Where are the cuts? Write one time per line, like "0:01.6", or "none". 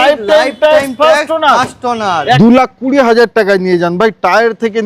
0:02.4